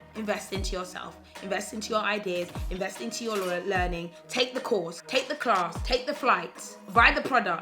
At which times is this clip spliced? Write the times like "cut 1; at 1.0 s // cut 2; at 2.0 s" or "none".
cut 1; at 5.0 s // cut 2; at 5.8 s